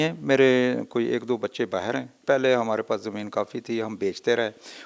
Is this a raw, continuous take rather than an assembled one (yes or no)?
no